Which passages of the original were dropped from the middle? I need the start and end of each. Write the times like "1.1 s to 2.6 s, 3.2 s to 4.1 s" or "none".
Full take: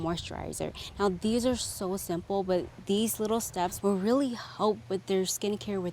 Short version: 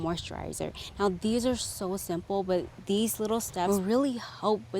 3.7 s to 3.8 s